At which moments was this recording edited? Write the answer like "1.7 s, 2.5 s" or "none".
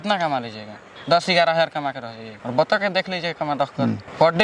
none